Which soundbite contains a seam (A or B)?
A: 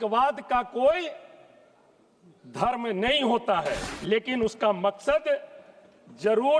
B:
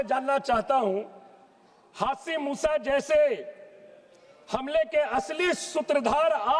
A